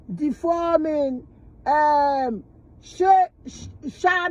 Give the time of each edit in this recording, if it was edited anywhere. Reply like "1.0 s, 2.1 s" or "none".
none